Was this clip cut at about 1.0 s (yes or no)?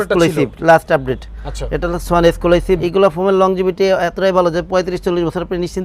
no